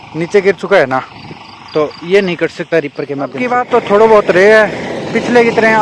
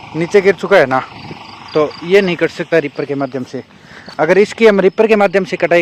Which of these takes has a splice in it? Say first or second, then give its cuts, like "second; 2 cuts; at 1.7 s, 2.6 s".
first; 1 cut; at 3.4 s